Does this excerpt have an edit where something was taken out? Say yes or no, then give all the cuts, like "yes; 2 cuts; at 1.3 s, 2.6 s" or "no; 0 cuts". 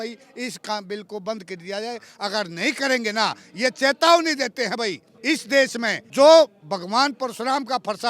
yes; 2 cuts; at 5.1 s, 6.0 s